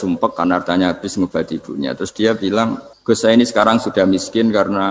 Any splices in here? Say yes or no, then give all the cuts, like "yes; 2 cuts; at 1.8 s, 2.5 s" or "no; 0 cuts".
yes; 1 cut; at 2.9 s